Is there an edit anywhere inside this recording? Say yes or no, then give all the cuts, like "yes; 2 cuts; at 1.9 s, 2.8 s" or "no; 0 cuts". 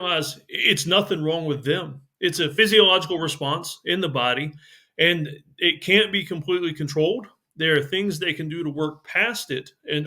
yes; 1 cut; at 2.5 s